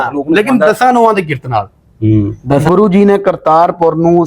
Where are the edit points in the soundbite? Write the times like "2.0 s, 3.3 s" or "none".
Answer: 2.6 s